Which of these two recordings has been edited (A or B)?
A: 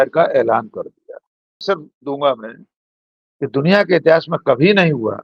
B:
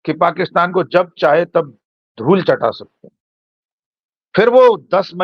A